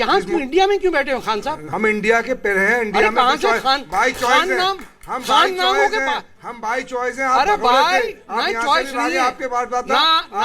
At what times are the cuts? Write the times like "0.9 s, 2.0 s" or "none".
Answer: 1.6 s